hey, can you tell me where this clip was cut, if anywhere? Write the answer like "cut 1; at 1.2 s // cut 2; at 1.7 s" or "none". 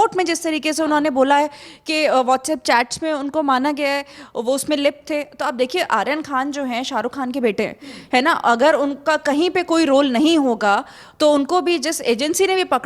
none